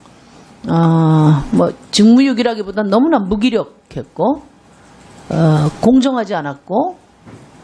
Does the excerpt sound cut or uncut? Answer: uncut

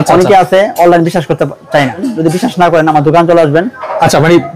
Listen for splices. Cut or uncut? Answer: cut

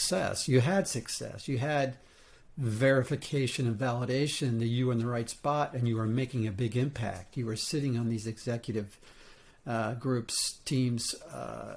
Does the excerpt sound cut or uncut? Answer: uncut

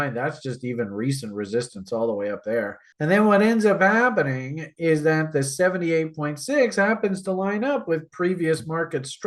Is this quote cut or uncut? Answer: uncut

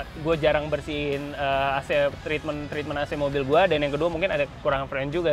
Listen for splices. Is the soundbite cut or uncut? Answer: uncut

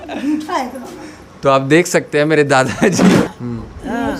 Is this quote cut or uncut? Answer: cut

